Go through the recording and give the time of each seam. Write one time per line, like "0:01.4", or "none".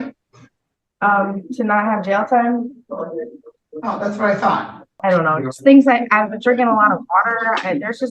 0:04.9